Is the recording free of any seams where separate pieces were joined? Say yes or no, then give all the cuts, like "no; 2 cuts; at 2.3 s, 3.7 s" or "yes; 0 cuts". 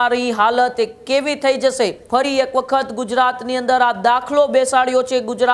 no; 1 cut; at 2.0 s